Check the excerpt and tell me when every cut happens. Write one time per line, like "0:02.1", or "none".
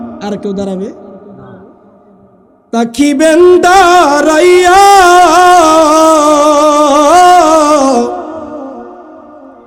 none